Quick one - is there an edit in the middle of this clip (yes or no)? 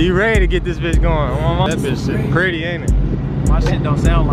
yes